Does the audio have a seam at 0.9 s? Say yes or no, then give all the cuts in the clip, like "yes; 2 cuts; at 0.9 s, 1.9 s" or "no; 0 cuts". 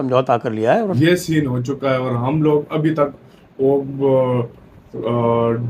yes; 1 cut; at 0.9 s